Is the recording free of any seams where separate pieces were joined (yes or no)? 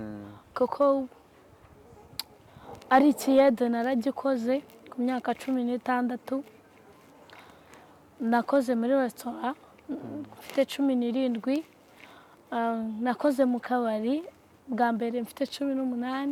yes